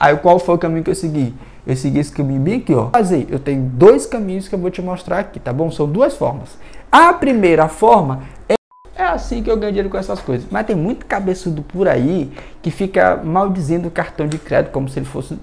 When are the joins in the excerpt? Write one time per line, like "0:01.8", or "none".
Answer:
0:02.9
0:08.6